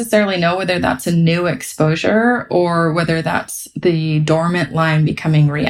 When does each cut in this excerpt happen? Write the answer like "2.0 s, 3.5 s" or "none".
none